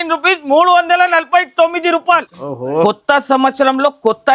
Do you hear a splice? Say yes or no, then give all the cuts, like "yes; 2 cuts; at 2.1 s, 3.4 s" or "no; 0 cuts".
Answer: yes; 1 cut; at 2.2 s